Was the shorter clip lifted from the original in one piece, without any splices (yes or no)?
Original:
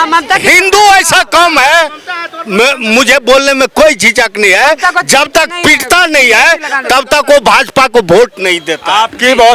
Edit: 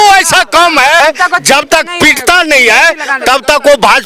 no